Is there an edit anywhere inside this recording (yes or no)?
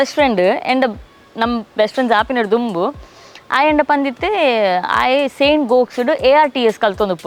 no